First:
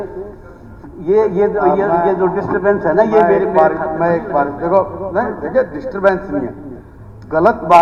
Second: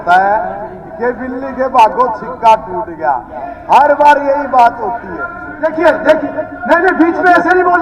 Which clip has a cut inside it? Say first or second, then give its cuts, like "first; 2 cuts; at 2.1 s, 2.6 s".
second; 1 cut; at 5.6 s